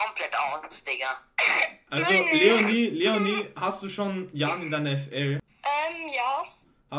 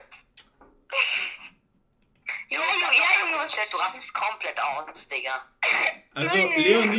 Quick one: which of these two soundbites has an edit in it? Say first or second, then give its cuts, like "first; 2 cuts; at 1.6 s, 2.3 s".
first; 1 cut; at 5.5 s